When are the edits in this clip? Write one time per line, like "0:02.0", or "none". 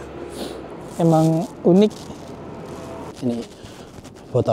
0:03.1